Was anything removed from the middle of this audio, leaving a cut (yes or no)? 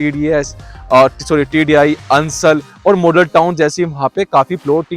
no